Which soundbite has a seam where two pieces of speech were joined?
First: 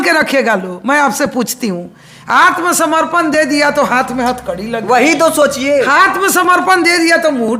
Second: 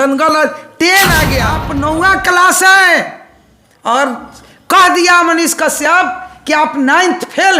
second; 1 cut; at 1.6 s

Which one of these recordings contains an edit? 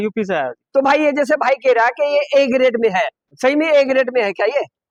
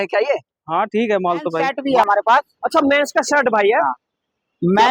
second; 1 cut; at 1.7 s

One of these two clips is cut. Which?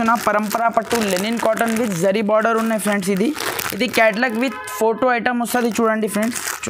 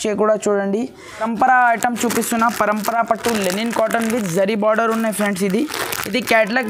second; 1 cut; at 1.2 s

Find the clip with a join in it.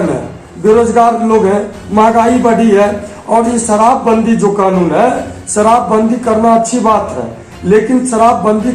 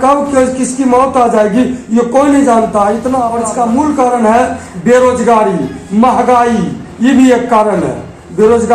second; 1 cut; at 3.3 s

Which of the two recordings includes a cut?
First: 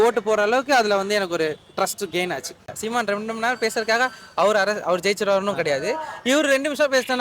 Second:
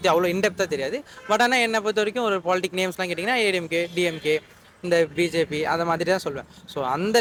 first; 1 cut; at 2.8 s

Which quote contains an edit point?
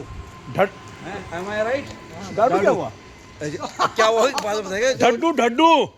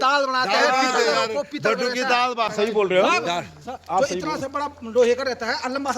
second; 1 cut; at 2.5 s

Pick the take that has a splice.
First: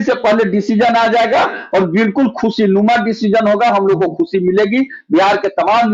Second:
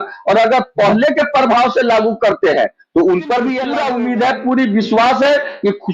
second; 1 cut; at 3.7 s

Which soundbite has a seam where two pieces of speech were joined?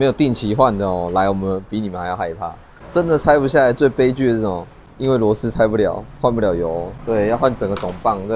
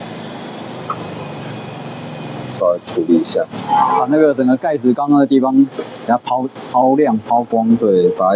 first; 3 cuts; at 2.7 s, 4.9 s, 6.9 s

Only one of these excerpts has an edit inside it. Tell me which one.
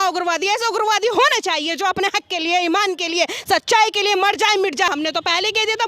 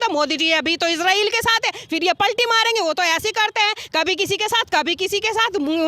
first; 1 cut; at 4.9 s

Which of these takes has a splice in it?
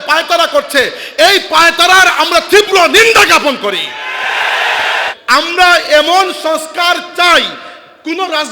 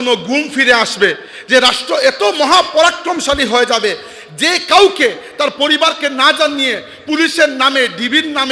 first; 1 cut; at 5.1 s

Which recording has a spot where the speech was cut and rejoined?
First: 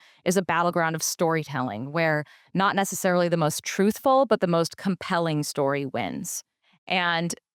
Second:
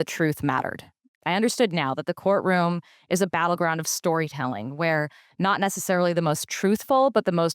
second; 1 cut; at 1.2 s

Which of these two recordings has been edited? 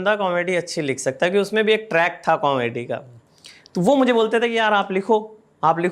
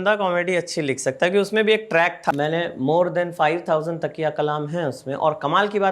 second; 1 cut; at 2.3 s

